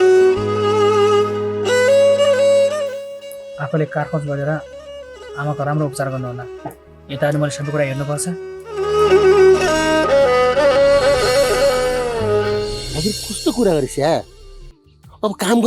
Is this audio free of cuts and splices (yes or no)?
no